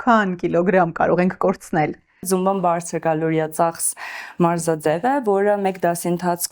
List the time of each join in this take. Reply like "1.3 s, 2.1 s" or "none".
none